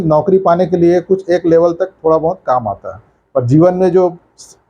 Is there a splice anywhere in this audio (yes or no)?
no